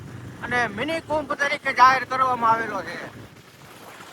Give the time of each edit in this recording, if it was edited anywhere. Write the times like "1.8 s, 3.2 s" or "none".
none